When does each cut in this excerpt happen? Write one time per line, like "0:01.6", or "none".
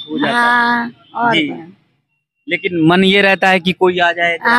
none